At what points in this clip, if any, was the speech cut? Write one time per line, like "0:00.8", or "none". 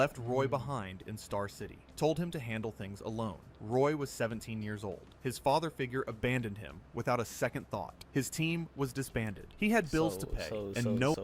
none